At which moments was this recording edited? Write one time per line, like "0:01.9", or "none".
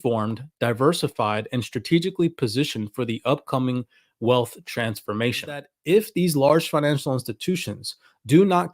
0:05.7